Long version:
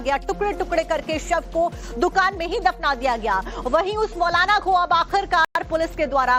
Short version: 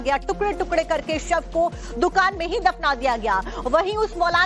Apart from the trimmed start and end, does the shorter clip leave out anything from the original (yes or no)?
no